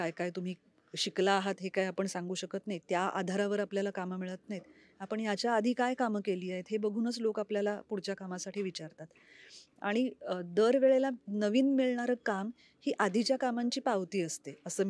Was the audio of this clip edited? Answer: no; 0 cuts

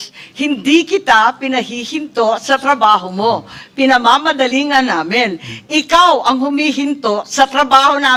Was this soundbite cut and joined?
no; 0 cuts

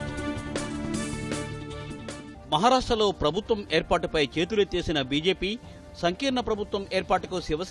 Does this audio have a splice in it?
no; 0 cuts

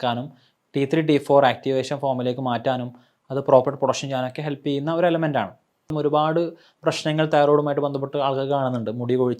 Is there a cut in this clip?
yes; 1 cut; at 5.9 s

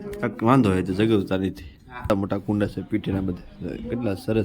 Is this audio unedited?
no; 1 cut; at 2.1 s

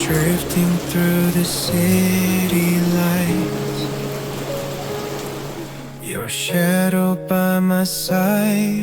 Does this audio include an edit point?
no; 0 cuts

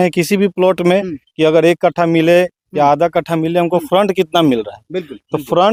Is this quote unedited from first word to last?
yes; 0 cuts

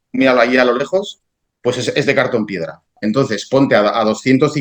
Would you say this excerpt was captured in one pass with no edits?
no; 1 cut; at 2.9 s

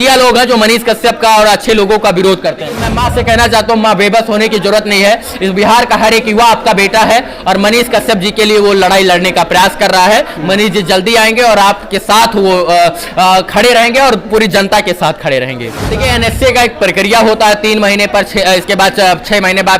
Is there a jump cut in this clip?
yes; 2 cuts; at 2.9 s, 15.8 s

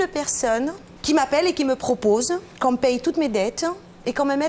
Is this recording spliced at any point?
yes; 2 cuts; at 0.9 s, 2.5 s

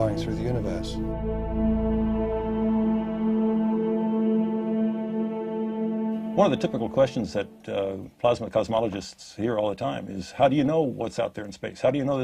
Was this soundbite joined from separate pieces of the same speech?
no; 0 cuts

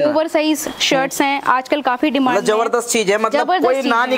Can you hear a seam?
no; 0 cuts

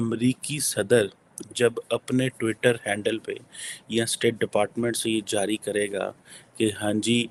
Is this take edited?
no; 0 cuts

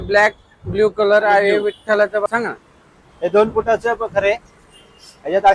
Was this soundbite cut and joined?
yes; 1 cut; at 2.3 s

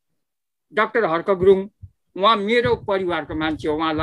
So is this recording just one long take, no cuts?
yes; 0 cuts

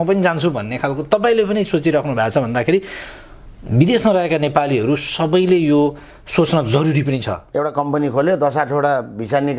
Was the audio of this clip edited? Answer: yes; 1 cut; at 7.4 s

